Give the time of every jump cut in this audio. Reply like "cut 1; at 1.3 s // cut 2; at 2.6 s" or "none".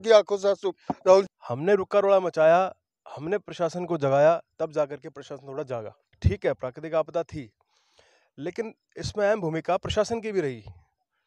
cut 1; at 1.4 s // cut 2; at 6.1 s